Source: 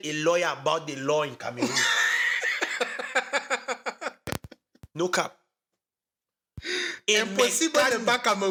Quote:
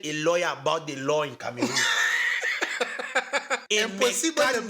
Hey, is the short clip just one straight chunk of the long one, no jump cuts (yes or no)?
no